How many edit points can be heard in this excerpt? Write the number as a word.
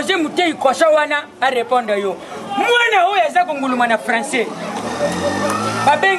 zero